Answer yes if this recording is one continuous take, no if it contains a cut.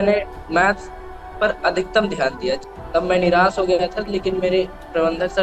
no